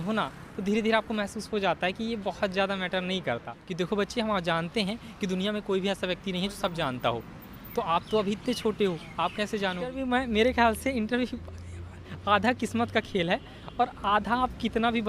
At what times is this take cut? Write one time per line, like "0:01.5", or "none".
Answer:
0:03.6
0:10.0